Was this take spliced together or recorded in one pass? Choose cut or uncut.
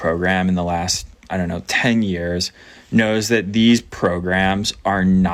uncut